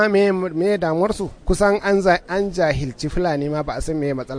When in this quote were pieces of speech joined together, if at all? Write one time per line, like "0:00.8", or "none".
0:01.3

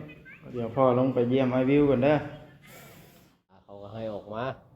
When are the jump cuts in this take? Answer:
0:03.6

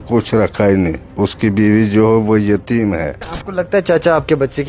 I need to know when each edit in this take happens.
0:03.4

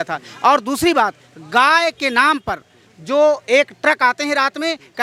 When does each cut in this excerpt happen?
none

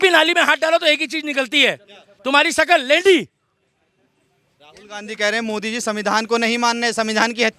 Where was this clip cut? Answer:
none

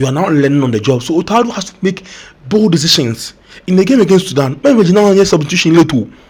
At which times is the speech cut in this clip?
none

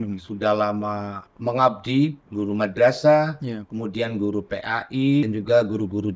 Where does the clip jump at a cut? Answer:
0:02.2
0:05.2

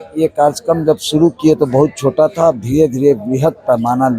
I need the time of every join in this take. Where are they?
none

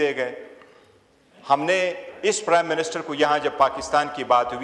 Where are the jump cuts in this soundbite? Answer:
none

